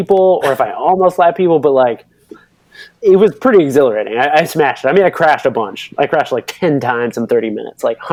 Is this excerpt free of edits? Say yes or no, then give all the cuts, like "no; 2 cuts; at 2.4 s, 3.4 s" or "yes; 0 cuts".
yes; 0 cuts